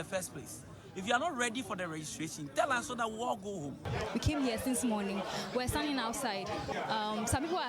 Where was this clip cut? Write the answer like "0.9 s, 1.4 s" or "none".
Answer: 3.9 s, 6.7 s

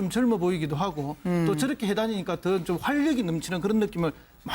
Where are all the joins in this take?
1.0 s

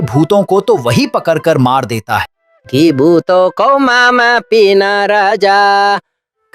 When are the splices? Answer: 2.3 s

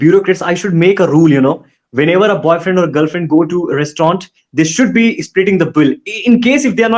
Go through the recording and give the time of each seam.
none

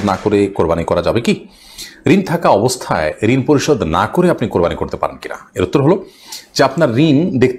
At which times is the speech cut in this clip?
none

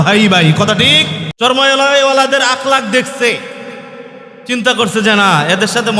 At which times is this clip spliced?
1.2 s

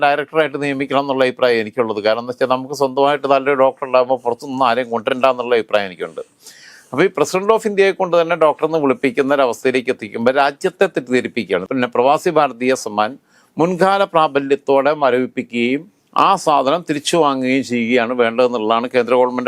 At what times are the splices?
none

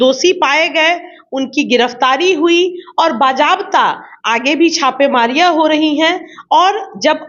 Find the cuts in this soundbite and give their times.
none

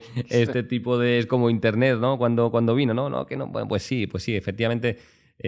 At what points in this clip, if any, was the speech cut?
none

